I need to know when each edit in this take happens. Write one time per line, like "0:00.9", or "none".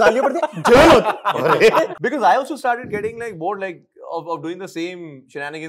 0:01.9